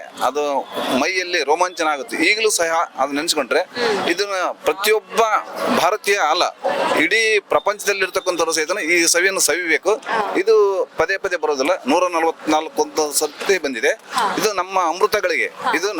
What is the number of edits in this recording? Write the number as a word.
zero